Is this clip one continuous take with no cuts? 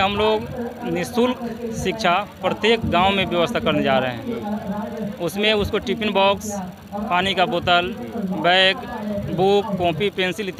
yes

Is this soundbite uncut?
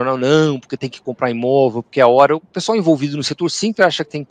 yes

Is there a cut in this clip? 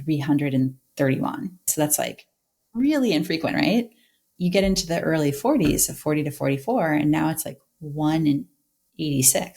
yes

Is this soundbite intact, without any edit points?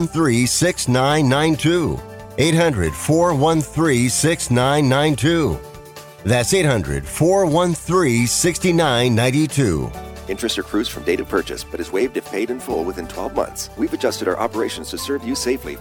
no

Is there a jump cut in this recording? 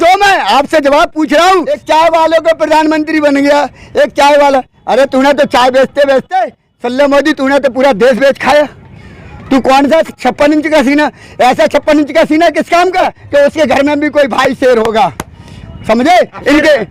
yes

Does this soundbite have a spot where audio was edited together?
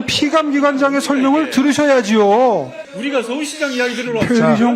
yes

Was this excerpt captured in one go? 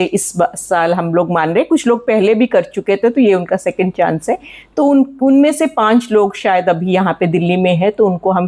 yes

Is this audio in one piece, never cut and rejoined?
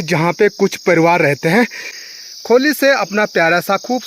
no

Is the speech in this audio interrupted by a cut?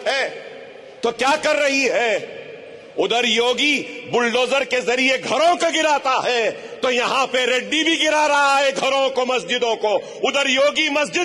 no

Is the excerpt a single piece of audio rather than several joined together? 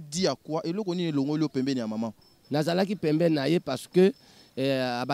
no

